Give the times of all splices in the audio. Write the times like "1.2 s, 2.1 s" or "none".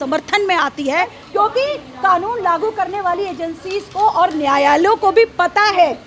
1.2 s